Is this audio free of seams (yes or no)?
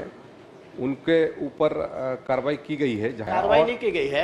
no